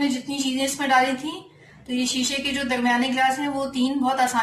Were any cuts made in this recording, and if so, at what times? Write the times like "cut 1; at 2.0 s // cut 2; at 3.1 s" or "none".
none